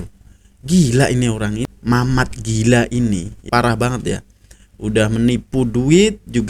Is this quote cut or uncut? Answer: cut